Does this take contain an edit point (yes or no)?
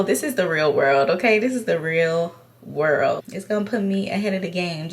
yes